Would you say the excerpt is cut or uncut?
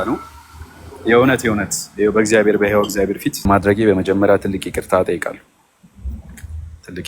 cut